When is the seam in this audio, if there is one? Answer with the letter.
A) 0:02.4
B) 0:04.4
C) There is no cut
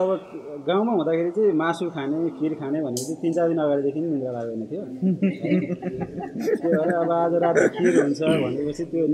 C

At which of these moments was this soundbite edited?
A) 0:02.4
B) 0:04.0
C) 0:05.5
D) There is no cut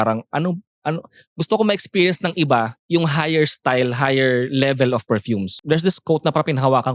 C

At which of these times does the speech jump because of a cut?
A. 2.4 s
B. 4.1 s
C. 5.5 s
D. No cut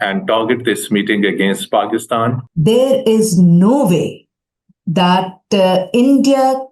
A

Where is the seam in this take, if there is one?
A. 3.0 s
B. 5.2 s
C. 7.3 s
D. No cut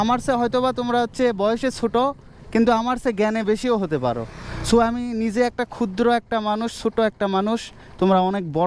D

